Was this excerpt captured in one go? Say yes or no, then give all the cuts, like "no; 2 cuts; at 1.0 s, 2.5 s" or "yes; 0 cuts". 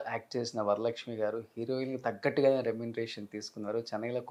yes; 0 cuts